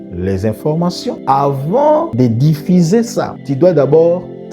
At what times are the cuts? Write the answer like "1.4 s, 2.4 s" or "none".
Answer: 1.2 s, 2.1 s, 3.3 s